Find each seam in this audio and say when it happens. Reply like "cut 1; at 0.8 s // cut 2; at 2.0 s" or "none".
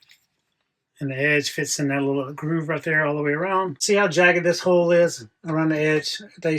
cut 1; at 3.8 s